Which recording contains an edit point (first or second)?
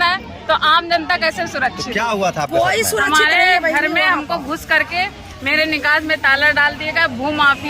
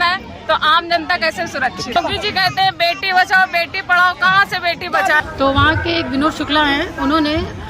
second